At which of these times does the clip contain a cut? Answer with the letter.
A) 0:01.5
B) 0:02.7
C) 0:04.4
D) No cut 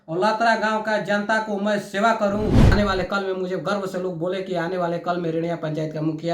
B